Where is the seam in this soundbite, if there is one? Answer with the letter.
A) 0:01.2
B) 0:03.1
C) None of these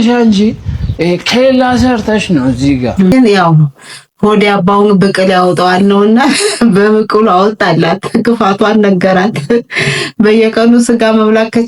B